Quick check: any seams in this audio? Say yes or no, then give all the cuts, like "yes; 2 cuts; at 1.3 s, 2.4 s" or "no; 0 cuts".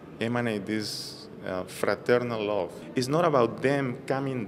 yes; 1 cut; at 2.8 s